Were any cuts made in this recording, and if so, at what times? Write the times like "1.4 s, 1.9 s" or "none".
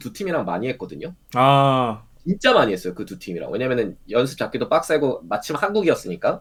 none